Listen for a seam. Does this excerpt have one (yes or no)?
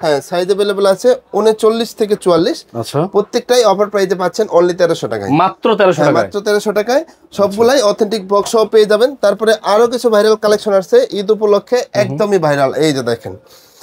no